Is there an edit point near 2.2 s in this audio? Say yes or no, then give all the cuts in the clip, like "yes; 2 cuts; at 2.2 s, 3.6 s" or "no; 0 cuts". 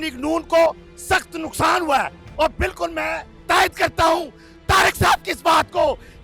no; 0 cuts